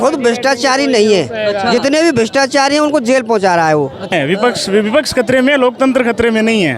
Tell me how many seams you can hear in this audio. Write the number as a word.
one